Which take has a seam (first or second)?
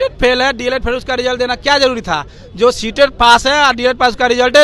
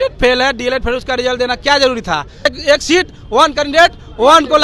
second